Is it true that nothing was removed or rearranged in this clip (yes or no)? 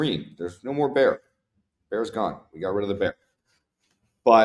yes